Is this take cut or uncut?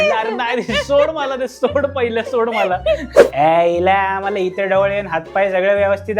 cut